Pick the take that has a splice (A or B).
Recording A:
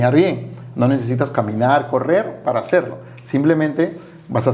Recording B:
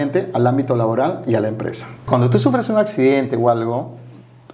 B